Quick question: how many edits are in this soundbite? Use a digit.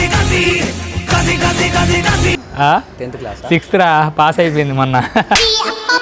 1